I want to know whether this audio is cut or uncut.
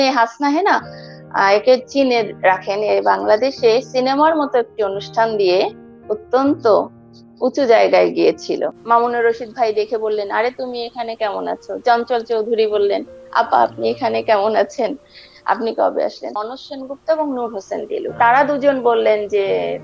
cut